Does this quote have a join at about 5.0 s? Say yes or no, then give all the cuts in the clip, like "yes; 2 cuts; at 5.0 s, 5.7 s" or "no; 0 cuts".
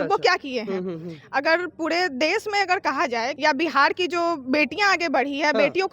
no; 1 cut; at 3.3 s